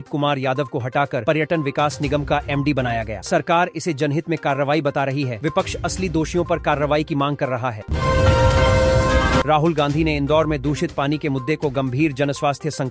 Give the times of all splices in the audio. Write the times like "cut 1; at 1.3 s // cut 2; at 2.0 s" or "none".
cut 1; at 7.8 s // cut 2; at 9.4 s